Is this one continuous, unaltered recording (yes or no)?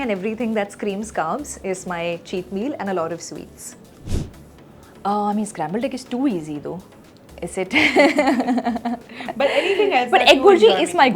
yes